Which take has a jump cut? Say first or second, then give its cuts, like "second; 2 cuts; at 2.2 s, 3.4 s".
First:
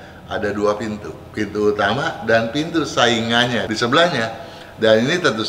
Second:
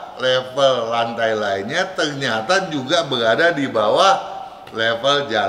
first; 1 cut; at 3.6 s